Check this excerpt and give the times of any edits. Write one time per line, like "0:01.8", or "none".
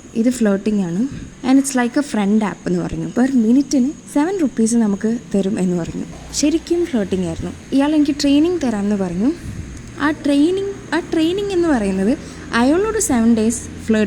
0:03.1
0:06.2